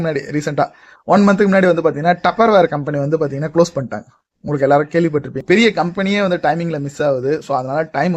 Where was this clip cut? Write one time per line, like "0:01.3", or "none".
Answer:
0:05.3